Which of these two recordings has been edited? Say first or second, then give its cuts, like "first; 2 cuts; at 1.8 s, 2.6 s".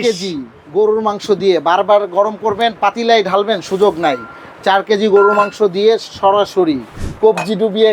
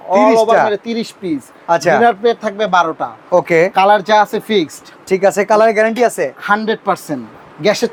first; 1 cut; at 6.9 s